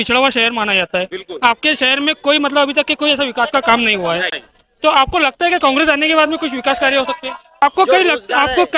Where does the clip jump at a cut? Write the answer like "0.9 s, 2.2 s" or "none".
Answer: 7.6 s